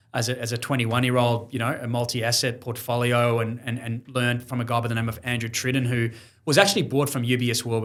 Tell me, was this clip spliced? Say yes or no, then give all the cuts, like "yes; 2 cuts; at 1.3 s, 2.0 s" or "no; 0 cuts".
no; 0 cuts